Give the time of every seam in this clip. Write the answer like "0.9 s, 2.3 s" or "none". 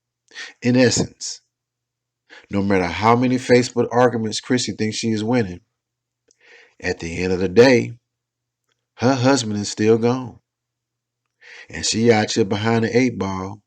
3.1 s